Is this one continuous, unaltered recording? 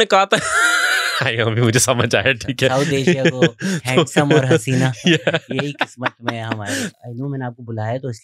no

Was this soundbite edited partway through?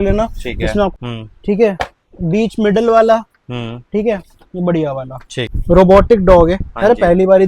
yes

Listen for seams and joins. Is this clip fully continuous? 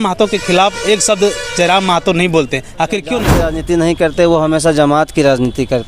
no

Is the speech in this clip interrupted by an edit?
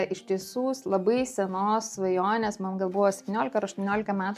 no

